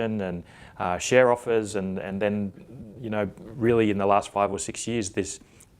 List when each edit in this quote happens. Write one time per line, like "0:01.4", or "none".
0:03.6